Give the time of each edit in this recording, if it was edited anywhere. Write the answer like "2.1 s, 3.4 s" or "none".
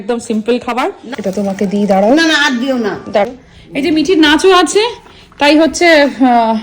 1.0 s, 3.3 s